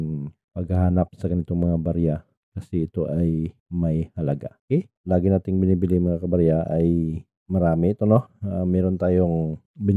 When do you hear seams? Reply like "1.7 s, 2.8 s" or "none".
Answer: 5.0 s